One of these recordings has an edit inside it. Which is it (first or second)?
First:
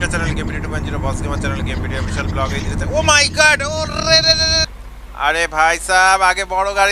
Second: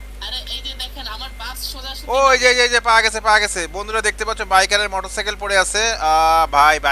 first